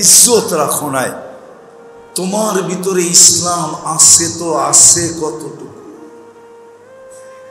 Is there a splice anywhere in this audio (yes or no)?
yes